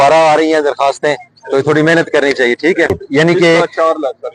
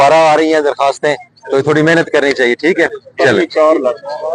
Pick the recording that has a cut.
first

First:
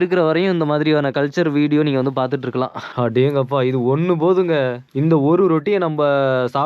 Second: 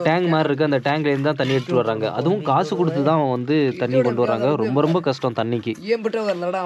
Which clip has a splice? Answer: first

